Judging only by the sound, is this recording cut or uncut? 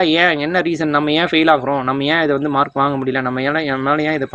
uncut